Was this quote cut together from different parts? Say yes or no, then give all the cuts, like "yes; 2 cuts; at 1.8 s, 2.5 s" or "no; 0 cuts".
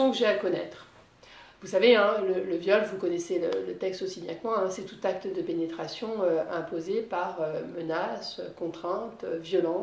no; 0 cuts